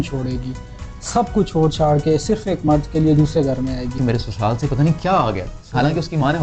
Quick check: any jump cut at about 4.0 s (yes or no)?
yes